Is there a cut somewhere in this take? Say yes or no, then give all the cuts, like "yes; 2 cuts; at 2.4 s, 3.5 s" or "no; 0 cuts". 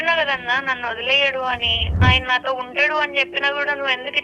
yes; 1 cut; at 2.0 s